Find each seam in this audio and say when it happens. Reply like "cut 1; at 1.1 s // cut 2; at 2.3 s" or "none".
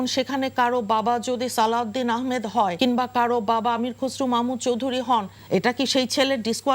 cut 1; at 2.7 s // cut 2; at 5.3 s